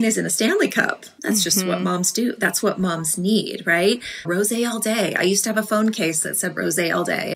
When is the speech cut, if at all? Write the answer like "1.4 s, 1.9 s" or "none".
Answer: 4.2 s